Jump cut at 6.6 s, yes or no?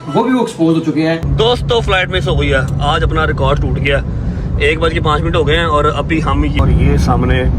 yes